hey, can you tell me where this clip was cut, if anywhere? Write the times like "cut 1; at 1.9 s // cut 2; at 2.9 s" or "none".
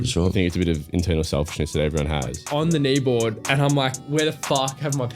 cut 1; at 2.4 s // cut 2; at 4.0 s